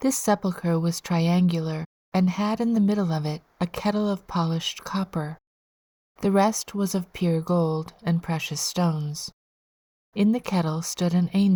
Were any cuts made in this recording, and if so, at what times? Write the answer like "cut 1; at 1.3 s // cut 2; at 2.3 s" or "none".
none